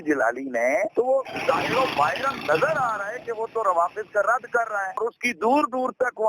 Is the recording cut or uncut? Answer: cut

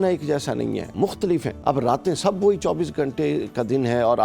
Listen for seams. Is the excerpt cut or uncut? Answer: cut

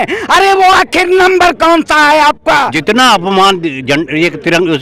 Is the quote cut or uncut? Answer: cut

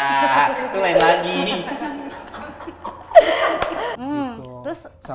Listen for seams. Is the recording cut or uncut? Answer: uncut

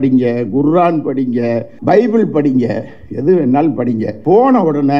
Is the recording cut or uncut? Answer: cut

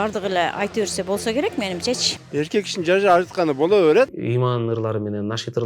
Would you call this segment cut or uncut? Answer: cut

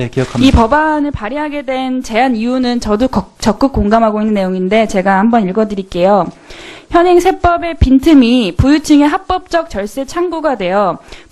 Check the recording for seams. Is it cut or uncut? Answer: uncut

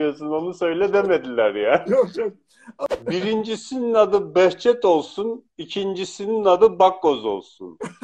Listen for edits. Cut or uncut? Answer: cut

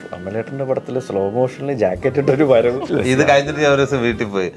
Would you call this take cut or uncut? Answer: cut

